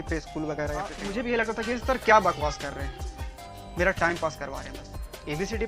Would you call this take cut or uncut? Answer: cut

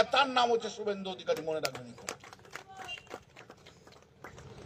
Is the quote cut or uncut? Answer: uncut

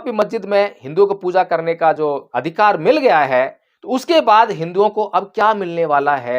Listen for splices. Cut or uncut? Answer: cut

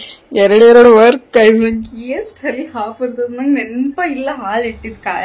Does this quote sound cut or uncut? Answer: uncut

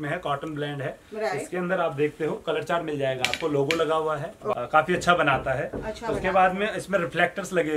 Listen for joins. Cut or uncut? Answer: cut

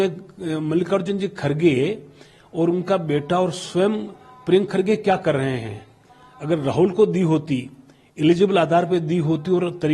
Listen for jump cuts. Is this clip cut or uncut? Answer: uncut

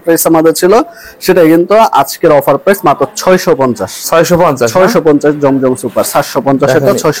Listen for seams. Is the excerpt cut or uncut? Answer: uncut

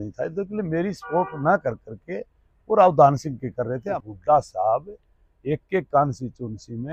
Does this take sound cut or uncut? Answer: cut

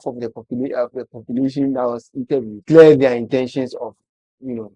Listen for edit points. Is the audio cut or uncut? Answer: cut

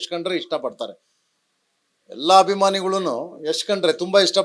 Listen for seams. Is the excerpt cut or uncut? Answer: uncut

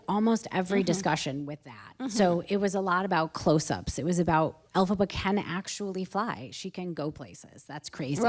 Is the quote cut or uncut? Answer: cut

